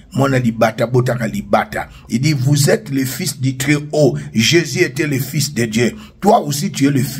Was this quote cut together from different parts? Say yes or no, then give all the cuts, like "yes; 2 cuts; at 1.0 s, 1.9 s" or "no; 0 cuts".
no; 0 cuts